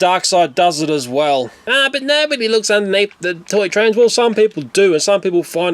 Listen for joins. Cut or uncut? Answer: cut